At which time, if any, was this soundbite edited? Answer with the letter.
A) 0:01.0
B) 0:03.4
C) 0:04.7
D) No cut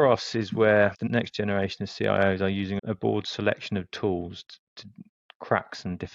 A